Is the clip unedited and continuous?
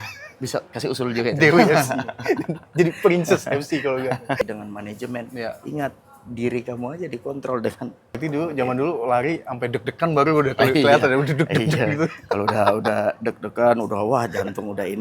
no; 2 cuts; at 4.4 s, 8.2 s

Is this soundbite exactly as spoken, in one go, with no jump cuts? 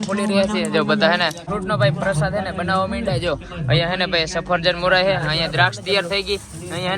no; 1 cut; at 1.5 s

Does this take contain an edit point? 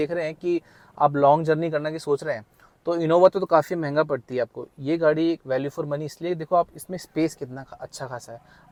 no; 0 cuts

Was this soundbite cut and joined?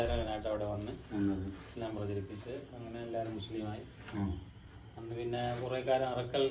no; 0 cuts

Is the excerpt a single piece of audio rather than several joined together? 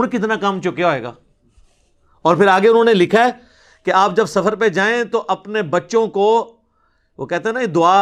yes; 0 cuts

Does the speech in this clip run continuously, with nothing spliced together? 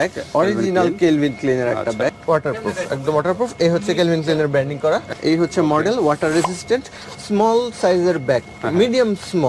no; 2 cuts; at 2.2 s, 5.1 s

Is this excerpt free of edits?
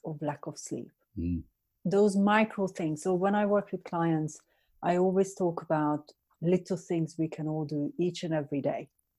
yes; 0 cuts

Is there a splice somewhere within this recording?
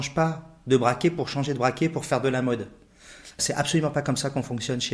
yes; 1 cut; at 3.4 s

